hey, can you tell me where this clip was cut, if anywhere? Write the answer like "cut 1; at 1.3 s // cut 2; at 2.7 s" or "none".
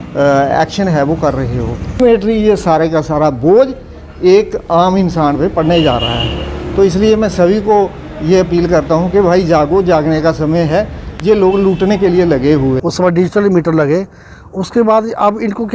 cut 1; at 2.0 s // cut 2; at 12.8 s